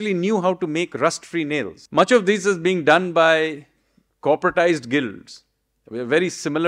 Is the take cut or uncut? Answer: cut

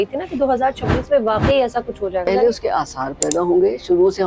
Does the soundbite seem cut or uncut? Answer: cut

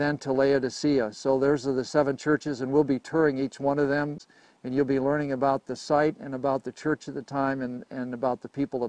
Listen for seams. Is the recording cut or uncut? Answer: cut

